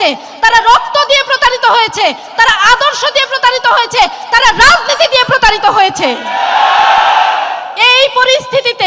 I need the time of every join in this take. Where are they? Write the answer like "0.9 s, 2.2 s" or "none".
none